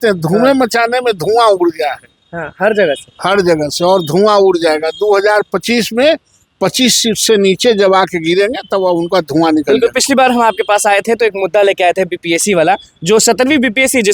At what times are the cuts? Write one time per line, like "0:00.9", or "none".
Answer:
none